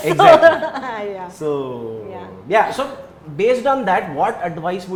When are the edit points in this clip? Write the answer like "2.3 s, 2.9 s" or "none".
none

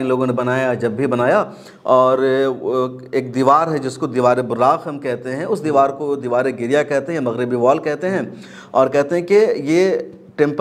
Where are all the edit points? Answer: none

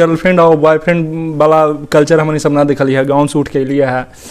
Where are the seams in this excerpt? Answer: none

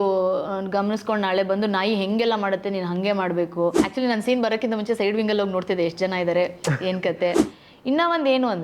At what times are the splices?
3.8 s, 7.5 s

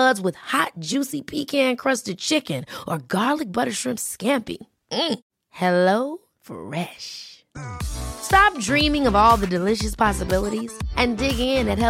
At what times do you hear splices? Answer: none

